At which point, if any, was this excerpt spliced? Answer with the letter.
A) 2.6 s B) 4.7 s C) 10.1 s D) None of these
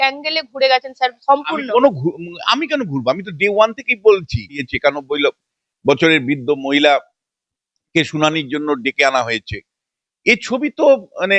B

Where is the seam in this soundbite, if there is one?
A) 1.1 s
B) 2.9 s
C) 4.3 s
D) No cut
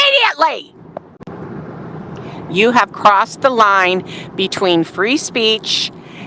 A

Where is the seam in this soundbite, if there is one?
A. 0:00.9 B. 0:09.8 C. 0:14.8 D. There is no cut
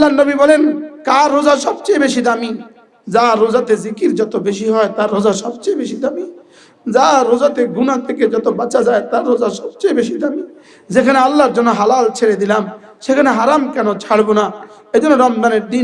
A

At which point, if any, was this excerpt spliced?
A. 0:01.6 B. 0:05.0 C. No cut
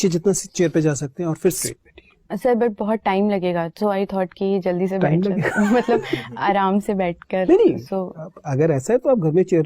A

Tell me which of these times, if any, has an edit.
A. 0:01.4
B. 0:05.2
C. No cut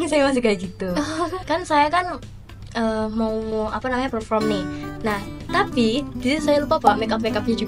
A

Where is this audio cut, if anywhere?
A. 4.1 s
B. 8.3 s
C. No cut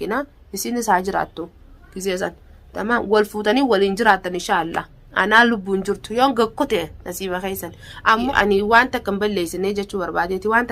B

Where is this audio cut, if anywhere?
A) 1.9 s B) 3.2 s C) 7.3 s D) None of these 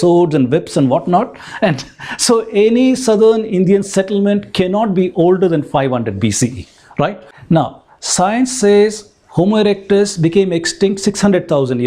C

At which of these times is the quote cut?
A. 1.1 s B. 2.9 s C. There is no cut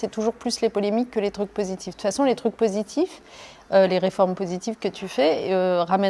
C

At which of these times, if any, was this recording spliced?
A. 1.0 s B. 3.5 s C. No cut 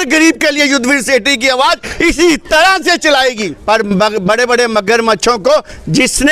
B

